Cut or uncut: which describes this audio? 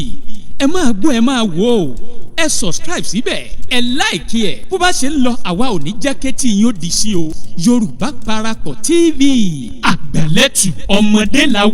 uncut